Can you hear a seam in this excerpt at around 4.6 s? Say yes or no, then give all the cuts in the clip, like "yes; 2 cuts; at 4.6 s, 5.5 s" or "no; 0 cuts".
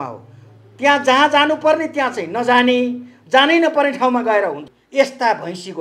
yes; 1 cut; at 4.6 s